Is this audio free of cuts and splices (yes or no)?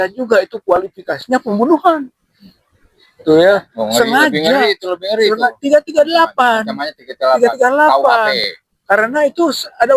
yes